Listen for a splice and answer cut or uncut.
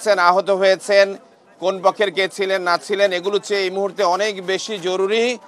uncut